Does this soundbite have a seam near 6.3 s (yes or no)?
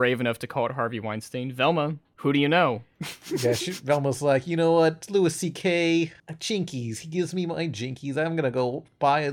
yes